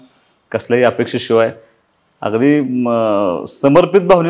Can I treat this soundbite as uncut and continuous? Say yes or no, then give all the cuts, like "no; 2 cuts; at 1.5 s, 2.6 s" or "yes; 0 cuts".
yes; 0 cuts